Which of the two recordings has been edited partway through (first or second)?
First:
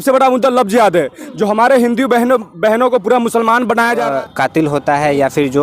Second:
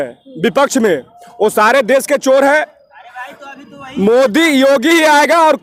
first